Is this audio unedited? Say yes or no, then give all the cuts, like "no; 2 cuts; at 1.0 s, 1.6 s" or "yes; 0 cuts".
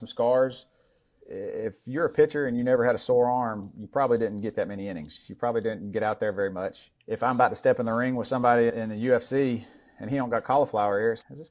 no; 2 cuts; at 1.2 s, 6.8 s